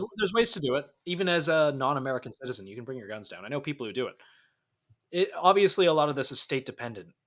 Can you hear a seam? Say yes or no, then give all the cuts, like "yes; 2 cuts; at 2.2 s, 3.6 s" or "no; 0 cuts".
no; 0 cuts